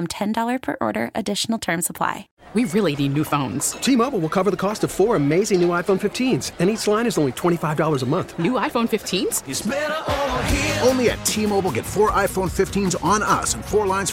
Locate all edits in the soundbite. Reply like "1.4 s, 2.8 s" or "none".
2.3 s